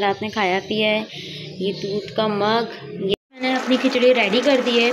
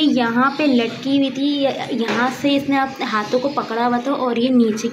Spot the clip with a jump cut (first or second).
first